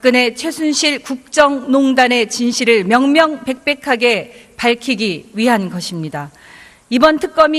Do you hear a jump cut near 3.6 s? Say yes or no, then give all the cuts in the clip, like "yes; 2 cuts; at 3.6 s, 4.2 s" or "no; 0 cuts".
no; 0 cuts